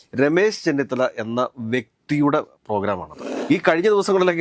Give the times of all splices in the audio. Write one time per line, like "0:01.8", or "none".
0:03.3